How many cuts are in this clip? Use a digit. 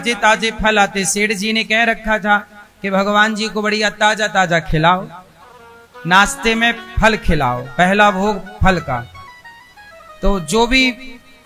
0